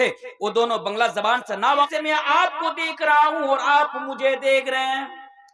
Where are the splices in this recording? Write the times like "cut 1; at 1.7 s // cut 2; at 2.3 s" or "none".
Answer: cut 1; at 1.9 s